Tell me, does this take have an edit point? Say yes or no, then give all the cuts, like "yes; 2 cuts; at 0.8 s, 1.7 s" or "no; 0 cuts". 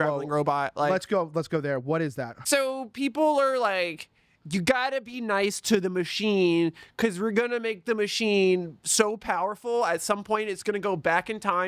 yes; 1 cut; at 2.3 s